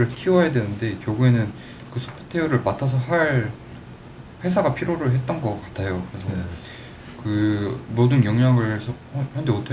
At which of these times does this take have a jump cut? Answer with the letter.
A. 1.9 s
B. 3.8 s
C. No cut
C